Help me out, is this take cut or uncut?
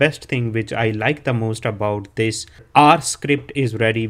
cut